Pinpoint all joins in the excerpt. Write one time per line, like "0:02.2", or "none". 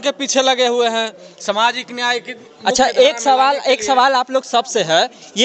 none